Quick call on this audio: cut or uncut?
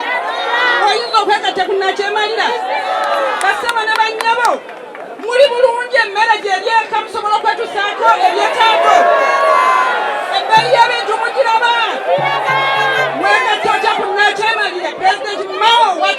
uncut